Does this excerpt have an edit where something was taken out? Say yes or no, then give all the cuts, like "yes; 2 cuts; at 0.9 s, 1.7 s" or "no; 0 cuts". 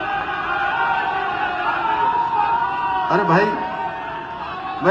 no; 0 cuts